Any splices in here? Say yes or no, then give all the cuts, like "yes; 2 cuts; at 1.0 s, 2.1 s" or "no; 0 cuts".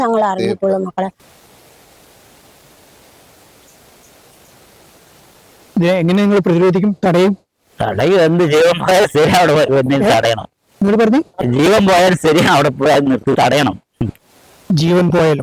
yes; 1 cut; at 1.2 s